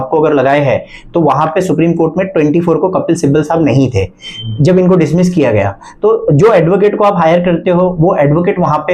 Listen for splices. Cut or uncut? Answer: uncut